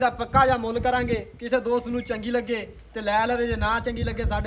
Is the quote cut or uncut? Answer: uncut